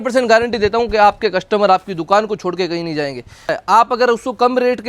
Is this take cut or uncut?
cut